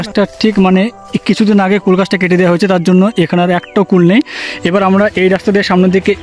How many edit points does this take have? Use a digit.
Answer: 0